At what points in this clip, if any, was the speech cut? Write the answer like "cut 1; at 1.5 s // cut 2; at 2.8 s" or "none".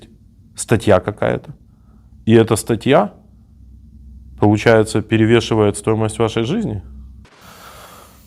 cut 1; at 7.3 s